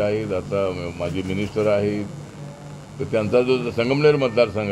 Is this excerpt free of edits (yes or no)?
yes